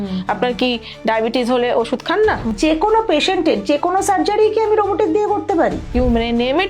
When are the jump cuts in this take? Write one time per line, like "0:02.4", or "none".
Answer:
0:02.5
0:05.9